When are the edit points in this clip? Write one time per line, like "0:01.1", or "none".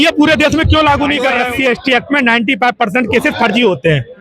0:01.4